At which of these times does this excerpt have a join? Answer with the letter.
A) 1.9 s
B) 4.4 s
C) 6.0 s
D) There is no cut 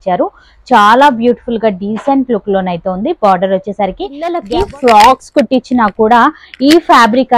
B